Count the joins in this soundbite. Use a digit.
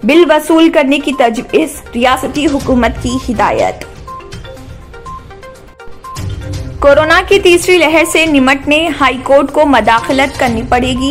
0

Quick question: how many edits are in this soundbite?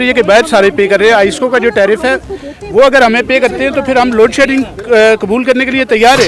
0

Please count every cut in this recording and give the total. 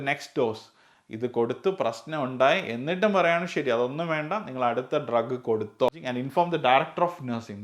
1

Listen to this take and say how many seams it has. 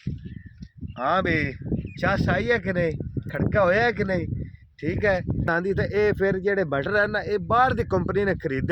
1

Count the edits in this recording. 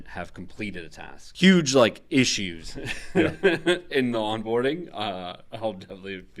0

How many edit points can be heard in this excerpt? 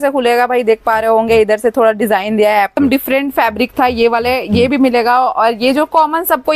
1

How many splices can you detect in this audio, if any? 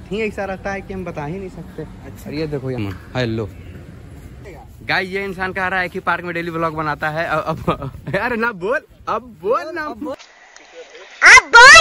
3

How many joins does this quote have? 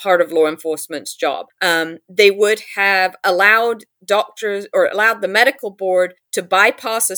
2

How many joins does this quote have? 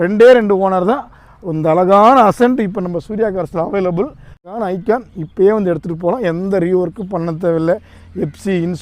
1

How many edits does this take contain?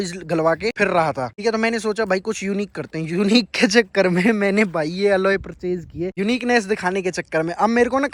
0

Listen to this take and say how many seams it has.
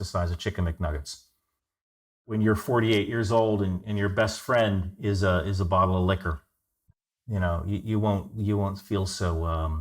1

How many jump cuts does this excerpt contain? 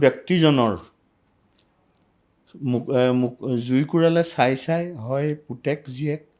0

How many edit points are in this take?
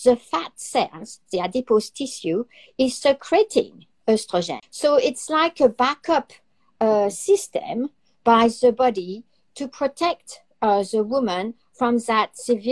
1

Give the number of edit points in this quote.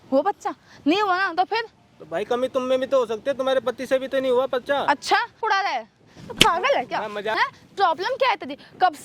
2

